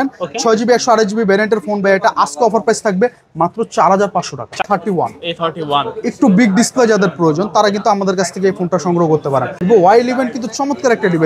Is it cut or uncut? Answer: cut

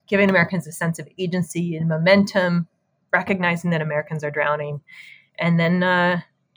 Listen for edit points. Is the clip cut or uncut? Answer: uncut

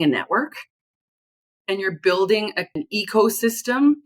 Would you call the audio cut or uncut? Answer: cut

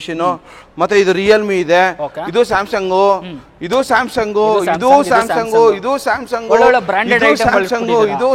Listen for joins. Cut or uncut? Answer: uncut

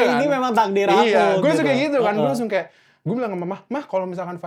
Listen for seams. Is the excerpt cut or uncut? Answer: uncut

